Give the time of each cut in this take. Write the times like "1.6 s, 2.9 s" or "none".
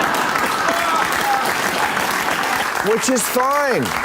2.6 s